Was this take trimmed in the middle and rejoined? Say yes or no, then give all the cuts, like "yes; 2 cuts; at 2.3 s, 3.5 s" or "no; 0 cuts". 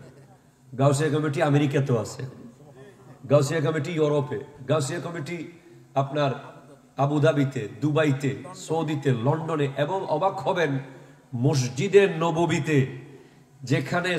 no; 0 cuts